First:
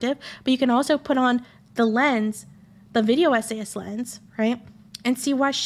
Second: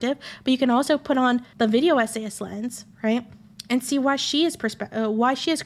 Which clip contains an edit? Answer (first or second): second